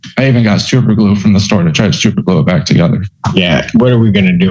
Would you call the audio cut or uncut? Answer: cut